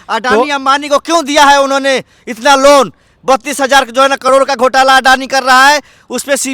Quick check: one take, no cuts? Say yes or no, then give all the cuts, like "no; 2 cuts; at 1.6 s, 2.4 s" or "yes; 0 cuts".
yes; 0 cuts